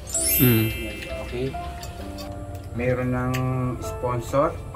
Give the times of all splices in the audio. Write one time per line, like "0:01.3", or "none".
0:02.0